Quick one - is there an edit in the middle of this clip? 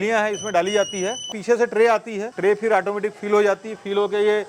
yes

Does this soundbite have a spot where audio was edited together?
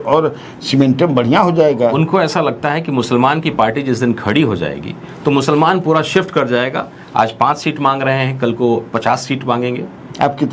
no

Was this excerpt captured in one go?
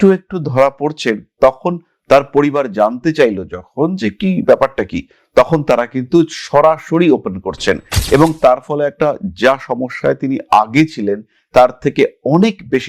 yes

